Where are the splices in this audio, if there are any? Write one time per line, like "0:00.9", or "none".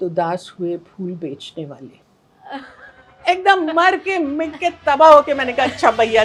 none